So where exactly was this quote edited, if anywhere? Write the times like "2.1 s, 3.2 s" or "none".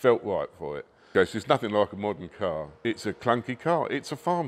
1.1 s, 2.8 s